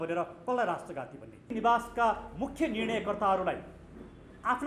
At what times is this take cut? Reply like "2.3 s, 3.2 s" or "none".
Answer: 1.5 s